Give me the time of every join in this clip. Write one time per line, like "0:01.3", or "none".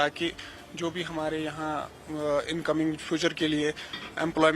0:01.1